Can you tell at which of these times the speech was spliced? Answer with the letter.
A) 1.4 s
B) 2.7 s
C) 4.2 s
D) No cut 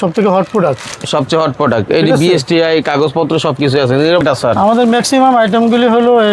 C